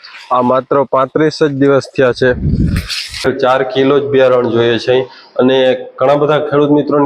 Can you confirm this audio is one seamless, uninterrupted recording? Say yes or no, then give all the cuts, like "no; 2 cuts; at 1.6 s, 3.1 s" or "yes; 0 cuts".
no; 1 cut; at 3.3 s